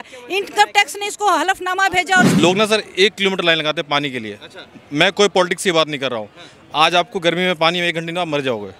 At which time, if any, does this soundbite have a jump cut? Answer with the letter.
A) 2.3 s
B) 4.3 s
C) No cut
A